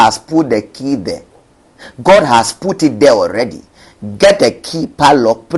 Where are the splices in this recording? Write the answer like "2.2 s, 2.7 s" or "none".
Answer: none